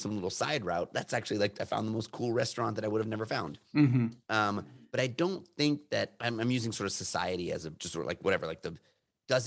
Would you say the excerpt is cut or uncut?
cut